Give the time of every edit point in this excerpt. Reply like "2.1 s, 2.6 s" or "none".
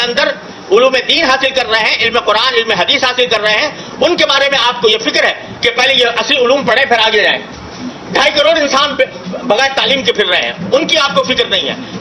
none